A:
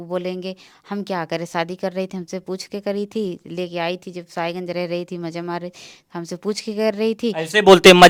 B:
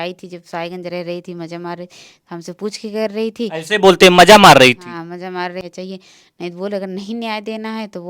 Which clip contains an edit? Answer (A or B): B